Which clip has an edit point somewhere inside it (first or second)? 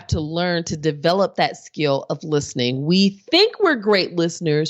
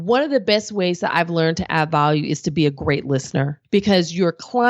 second